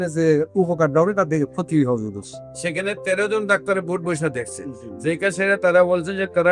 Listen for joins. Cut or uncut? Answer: uncut